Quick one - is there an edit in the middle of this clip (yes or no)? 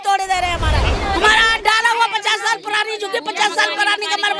yes